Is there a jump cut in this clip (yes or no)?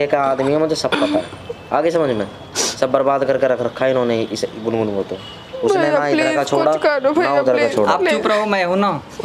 no